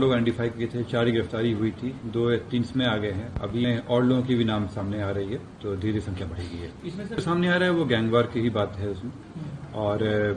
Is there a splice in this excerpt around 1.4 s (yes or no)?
no